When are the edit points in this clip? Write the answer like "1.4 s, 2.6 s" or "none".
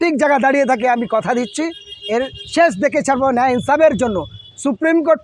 none